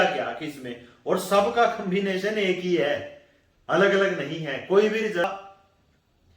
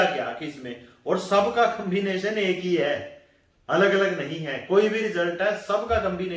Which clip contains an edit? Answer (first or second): first